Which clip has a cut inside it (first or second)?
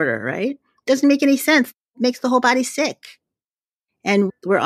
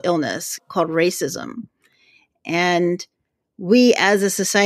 first